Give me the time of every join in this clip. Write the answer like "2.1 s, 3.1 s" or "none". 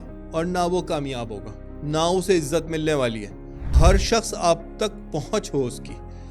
3.7 s

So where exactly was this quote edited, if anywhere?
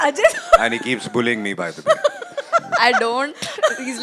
none

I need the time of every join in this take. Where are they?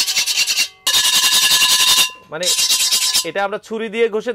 0.9 s

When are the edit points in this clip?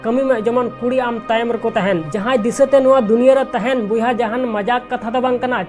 2.1 s

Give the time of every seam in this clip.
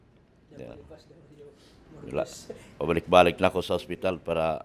none

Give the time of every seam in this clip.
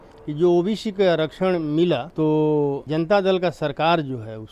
2.1 s, 2.8 s

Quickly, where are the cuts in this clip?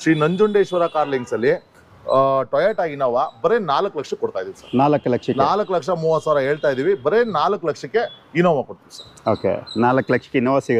none

